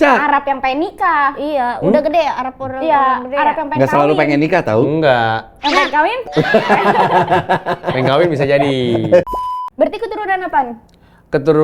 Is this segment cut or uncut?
cut